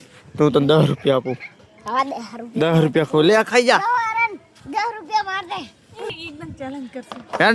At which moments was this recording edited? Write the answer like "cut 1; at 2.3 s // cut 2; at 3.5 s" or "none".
none